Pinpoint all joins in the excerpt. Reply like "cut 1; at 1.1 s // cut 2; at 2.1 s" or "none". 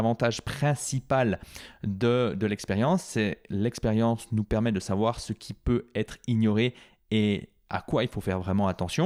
none